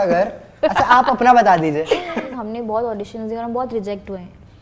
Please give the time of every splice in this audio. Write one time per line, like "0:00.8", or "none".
0:02.4